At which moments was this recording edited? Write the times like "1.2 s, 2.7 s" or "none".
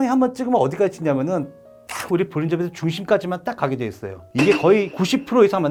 none